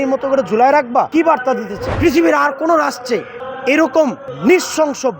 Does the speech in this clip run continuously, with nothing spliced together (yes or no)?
no